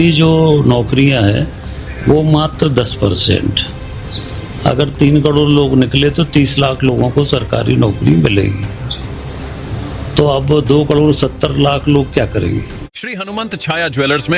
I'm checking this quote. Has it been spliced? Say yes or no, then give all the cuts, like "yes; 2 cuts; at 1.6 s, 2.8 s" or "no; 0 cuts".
yes; 1 cut; at 12.9 s